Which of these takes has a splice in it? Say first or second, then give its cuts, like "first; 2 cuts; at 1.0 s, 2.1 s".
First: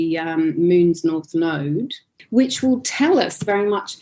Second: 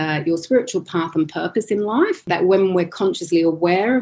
second; 1 cut; at 2.3 s